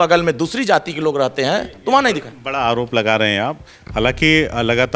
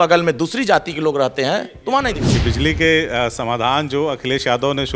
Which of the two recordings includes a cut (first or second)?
second